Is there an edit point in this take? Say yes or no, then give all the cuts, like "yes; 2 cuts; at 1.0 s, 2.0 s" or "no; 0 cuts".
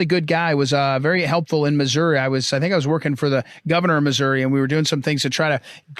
yes; 1 cut; at 3.7 s